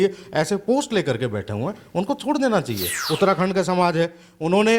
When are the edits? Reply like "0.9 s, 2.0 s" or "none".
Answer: 2.9 s